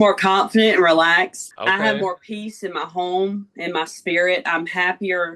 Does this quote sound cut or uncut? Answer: cut